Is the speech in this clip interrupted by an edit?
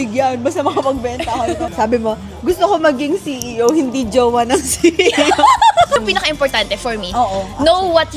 yes; 2 cuts; at 1.7 s, 6.0 s

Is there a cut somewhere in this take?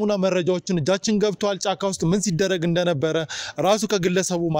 no; 0 cuts

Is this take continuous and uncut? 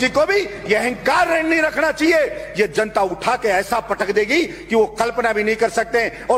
yes; 0 cuts

